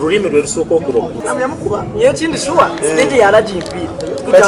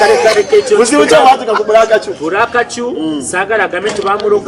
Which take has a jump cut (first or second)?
first